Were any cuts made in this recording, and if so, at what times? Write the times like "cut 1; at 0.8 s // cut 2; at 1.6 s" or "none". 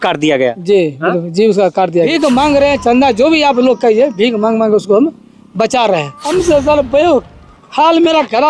cut 1; at 2.1 s // cut 2; at 6.2 s